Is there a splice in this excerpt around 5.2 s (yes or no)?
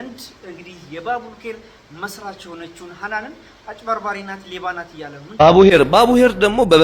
yes